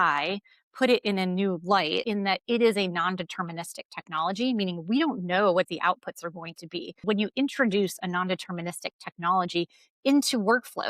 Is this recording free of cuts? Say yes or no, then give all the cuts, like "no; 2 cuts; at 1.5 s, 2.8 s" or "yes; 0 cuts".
no; 2 cuts; at 2.0 s, 7.0 s